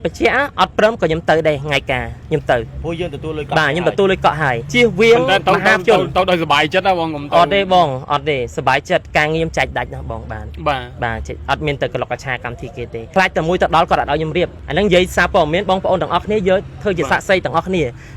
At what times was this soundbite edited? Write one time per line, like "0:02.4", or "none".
0:02.1
0:04.6
0:13.0
0:14.6